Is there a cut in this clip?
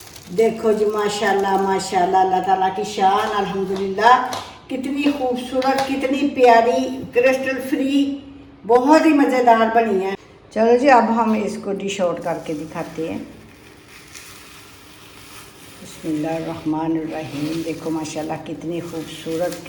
no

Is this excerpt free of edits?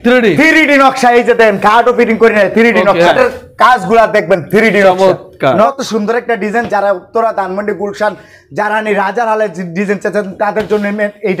no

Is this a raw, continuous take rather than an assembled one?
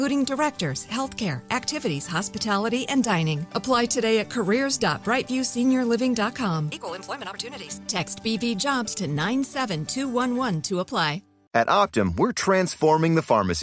yes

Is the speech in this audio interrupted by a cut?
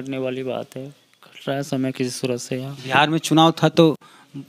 no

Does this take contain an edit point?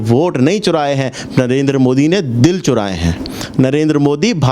no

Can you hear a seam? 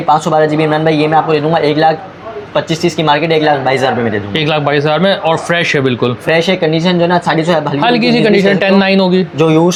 no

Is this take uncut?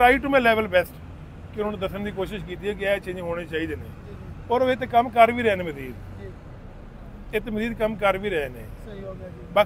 yes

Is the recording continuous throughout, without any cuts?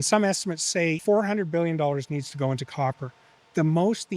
no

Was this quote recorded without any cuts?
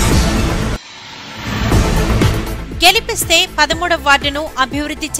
no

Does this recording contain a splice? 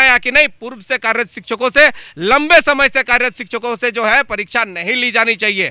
no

